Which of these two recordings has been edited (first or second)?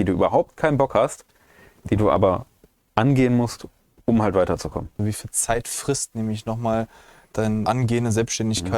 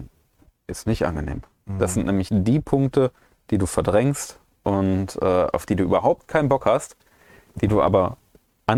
first